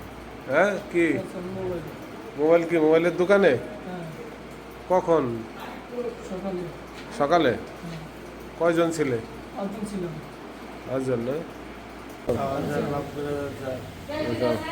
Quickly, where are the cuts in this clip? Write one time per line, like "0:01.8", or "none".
0:12.3